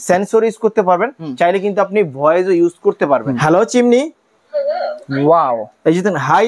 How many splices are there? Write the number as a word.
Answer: one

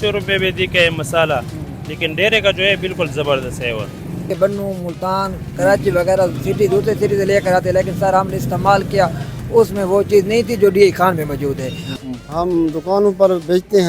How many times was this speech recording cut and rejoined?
two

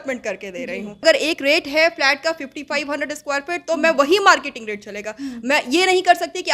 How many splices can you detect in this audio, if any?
one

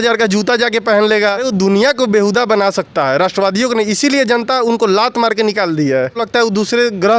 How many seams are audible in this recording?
two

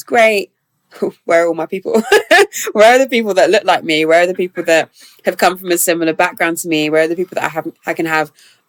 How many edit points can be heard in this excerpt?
zero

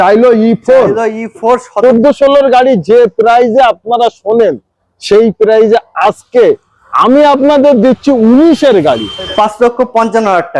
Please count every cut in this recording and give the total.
two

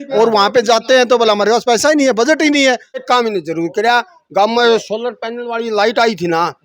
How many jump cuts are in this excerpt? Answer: one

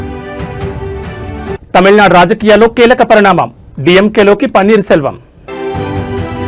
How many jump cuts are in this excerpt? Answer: two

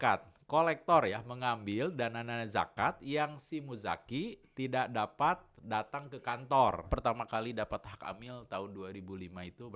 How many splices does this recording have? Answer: one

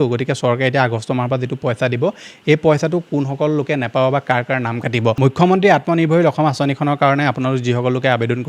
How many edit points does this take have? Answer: one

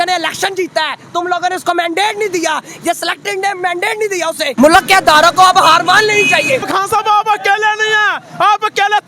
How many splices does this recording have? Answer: two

